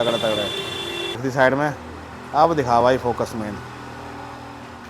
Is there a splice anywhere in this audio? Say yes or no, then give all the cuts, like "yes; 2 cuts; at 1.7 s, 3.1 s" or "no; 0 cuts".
yes; 1 cut; at 1.2 s